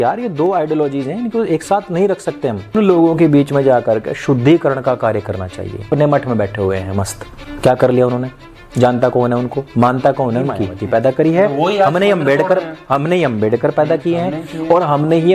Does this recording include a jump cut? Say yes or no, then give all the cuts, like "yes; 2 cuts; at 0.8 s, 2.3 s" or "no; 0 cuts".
yes; 3 cuts; at 2.7 s, 5.9 s, 10.7 s